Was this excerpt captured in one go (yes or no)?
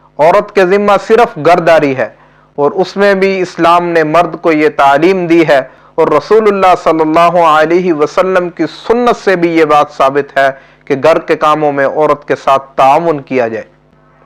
yes